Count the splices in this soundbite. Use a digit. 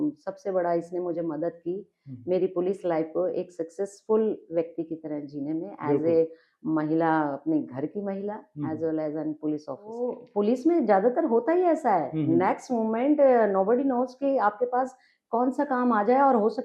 1